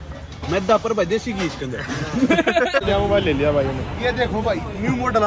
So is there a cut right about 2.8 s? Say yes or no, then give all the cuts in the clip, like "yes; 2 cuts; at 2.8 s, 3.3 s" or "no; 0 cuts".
yes; 1 cut; at 2.8 s